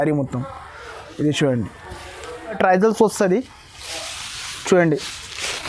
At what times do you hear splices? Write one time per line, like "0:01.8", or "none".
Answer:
0:02.6